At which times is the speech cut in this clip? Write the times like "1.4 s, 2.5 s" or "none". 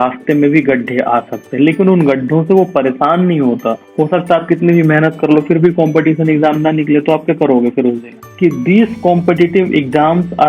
3.8 s, 8.1 s